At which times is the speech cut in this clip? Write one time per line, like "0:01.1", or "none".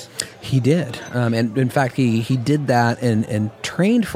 none

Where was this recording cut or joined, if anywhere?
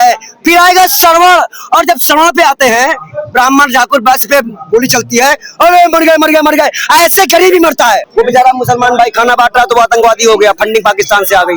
0:08.1

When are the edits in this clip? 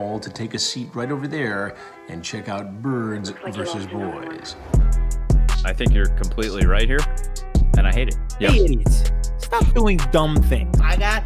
none

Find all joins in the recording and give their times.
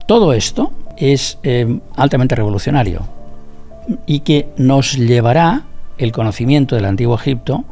0:00.9

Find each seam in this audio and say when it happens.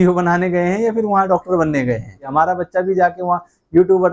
0:02.3

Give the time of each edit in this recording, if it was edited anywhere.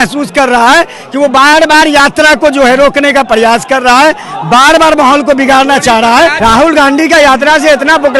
0:06.4

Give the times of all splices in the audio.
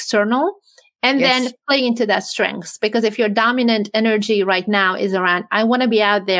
none

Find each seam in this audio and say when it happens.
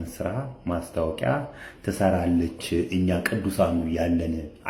none

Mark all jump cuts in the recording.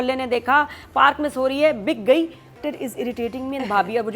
0:02.6

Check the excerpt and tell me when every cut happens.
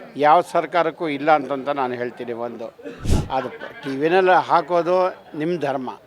0:03.1

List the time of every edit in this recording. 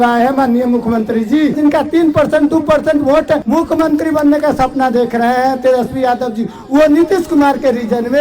0:01.6
0:03.4

